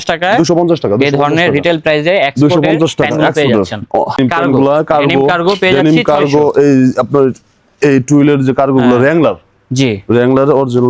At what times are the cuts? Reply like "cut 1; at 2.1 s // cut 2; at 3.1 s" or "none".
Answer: cut 1; at 4.2 s